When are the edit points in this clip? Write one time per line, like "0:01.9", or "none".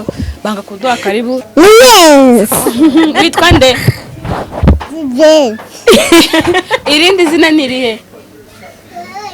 0:01.4